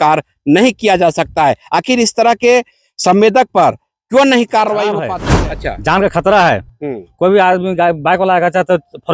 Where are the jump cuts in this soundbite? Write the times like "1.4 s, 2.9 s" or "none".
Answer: 5.1 s